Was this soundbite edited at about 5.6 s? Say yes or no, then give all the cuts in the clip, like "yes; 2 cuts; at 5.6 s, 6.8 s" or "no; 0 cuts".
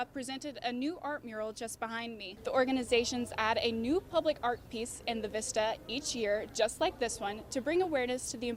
no; 1 cut; at 2.3 s